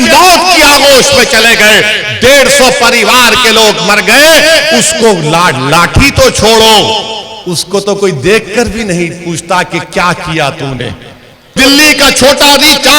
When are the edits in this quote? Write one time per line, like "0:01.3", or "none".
0:11.6